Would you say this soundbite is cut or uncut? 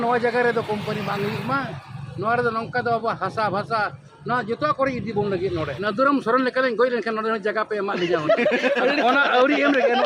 cut